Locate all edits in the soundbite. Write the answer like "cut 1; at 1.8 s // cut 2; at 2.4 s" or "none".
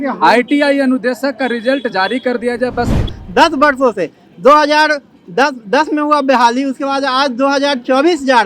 cut 1; at 3.1 s